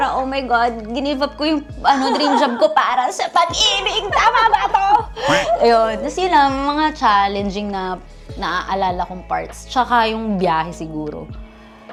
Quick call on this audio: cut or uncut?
uncut